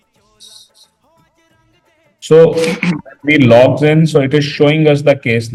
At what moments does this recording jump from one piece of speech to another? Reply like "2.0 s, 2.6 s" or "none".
none